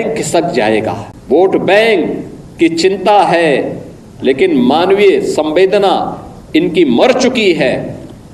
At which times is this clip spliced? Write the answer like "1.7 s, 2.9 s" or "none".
1.1 s

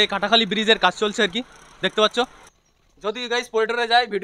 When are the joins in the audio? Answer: 2.4 s

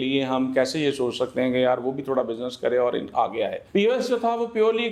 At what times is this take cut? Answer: none

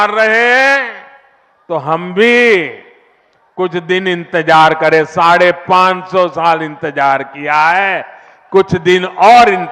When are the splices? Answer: none

